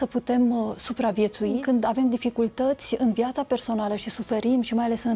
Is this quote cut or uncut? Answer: cut